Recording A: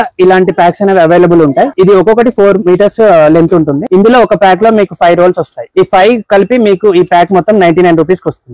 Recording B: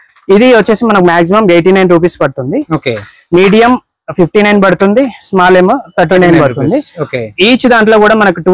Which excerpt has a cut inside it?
A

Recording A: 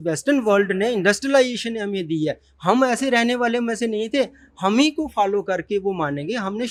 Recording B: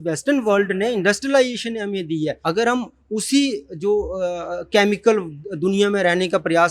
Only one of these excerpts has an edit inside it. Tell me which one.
B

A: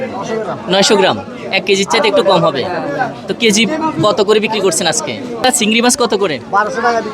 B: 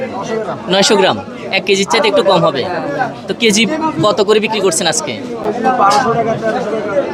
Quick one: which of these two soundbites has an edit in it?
A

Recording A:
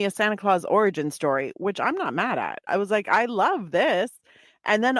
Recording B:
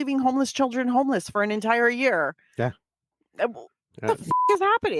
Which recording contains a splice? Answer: A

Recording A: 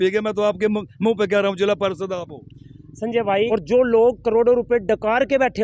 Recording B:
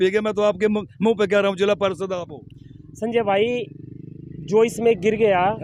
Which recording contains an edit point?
A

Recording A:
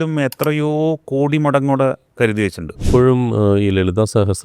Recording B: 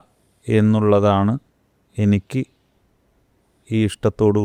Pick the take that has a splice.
A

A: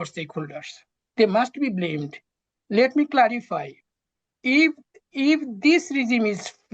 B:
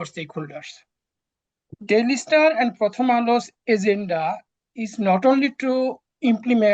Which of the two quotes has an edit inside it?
A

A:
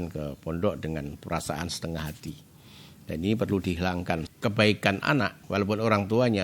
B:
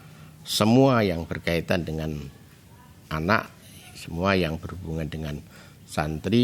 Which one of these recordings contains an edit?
A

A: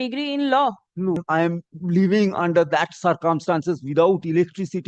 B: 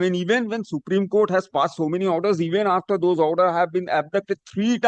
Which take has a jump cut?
A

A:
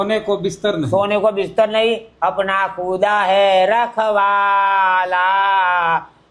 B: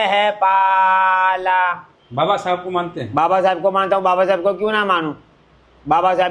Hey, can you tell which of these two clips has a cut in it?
B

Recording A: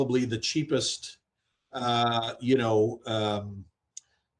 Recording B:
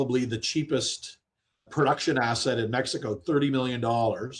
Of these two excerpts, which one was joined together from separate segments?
B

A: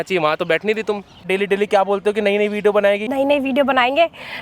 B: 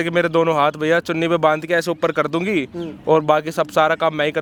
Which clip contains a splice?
A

